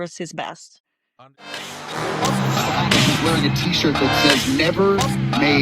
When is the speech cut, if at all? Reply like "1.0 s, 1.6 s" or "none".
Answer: 1.6 s

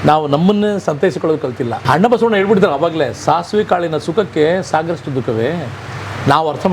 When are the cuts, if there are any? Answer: 1.8 s

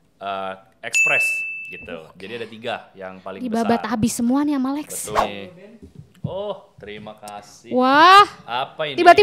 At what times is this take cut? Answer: 5.2 s

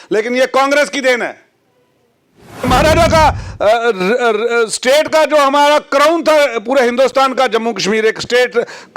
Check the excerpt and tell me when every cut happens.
2.6 s

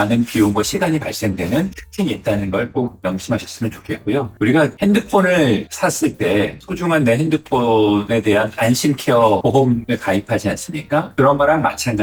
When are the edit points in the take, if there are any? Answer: none

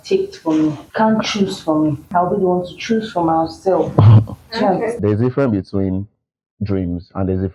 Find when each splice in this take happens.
0.8 s, 2.0 s, 4.9 s

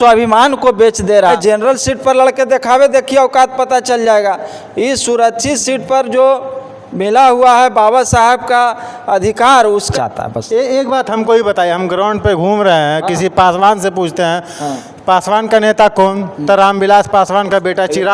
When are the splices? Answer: 1.3 s, 9.9 s

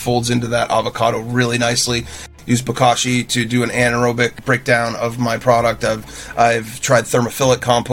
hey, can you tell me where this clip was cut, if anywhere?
2.3 s, 4.4 s

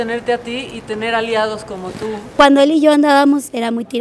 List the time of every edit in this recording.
2.3 s

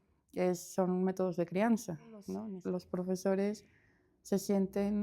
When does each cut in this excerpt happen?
2.4 s

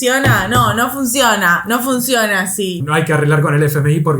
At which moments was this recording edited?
2.8 s

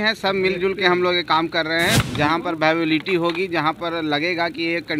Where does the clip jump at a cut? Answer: 2.0 s

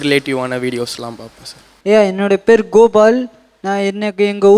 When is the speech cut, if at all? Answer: 1.7 s

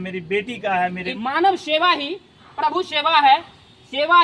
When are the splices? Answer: 1.0 s

